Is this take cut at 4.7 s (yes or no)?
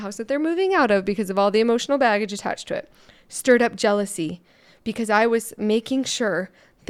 no